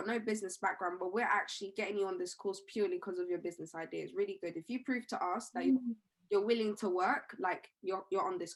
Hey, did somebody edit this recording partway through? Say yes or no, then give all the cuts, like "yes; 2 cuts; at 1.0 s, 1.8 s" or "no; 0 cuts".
no; 0 cuts